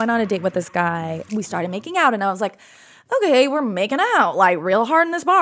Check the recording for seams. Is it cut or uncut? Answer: cut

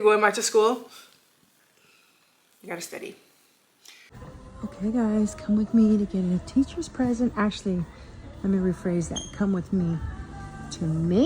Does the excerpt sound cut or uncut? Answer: cut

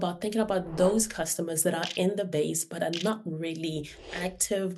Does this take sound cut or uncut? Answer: uncut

